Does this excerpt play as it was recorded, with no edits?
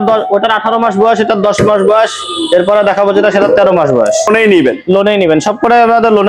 no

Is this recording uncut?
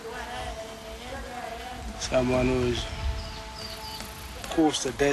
no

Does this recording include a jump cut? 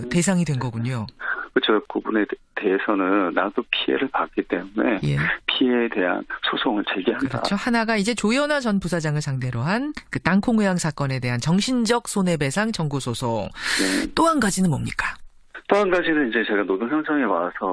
yes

